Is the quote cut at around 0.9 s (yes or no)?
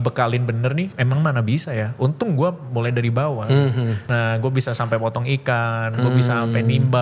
yes